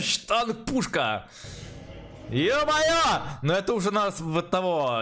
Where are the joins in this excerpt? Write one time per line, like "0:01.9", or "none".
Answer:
none